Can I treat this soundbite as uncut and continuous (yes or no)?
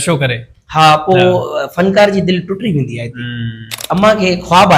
no